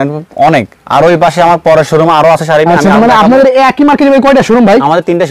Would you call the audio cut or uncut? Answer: uncut